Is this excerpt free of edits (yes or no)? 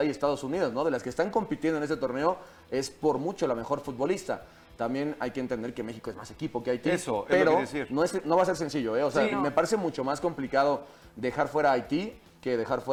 yes